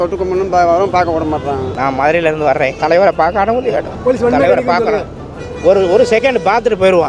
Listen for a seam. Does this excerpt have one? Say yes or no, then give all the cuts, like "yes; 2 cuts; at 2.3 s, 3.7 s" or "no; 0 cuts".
yes; 3 cuts; at 1.7 s, 2.7 s, 3.9 s